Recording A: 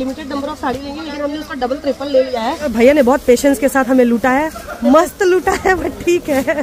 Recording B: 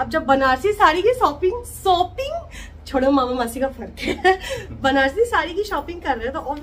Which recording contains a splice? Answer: A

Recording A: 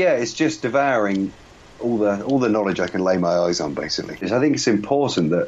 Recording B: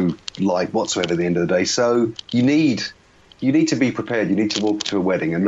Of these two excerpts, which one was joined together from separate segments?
A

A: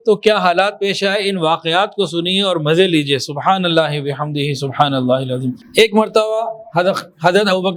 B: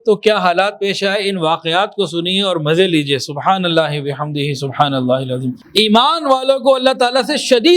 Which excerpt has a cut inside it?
B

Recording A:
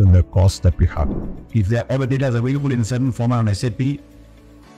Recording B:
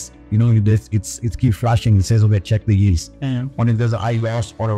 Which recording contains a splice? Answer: A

